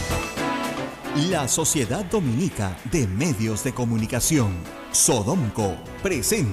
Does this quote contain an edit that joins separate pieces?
yes; 1 cut; at 1.0 s

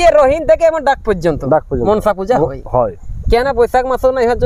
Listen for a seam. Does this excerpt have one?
no; 0 cuts

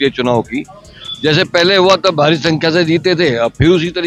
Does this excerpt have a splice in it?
no; 0 cuts

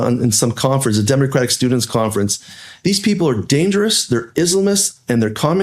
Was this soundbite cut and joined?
no; 0 cuts

